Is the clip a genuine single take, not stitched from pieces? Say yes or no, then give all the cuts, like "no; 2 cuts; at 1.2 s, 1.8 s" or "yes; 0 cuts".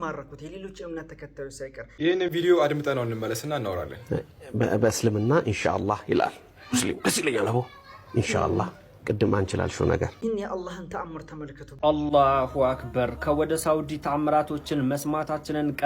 no; 3 cuts; at 1.8 s, 10.1 s, 11.6 s